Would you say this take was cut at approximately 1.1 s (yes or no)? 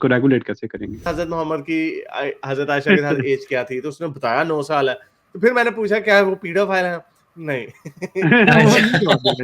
yes